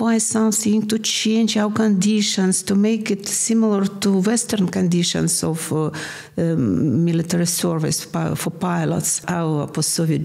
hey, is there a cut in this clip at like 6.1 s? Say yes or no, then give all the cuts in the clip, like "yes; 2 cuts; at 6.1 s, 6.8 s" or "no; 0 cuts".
no; 1 cut; at 9.2 s